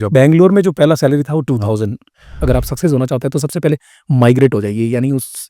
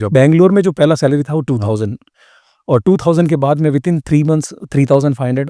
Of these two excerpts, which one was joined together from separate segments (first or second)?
first